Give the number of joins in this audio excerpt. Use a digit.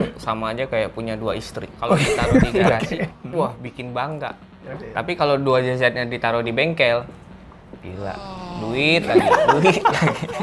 2